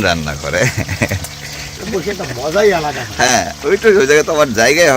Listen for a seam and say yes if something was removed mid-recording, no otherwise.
yes